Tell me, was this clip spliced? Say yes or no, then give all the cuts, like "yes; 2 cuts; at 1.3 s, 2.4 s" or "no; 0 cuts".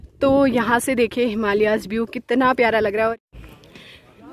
yes; 1 cut; at 3.1 s